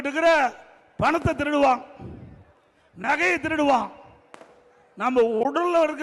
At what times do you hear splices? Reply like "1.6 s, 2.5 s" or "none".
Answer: none